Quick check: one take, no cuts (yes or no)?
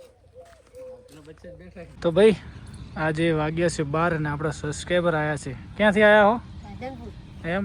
no